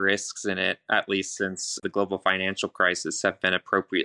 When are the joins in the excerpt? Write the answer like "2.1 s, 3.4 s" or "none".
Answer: 1.8 s